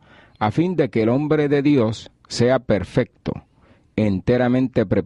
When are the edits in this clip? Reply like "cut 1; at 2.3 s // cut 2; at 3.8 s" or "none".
none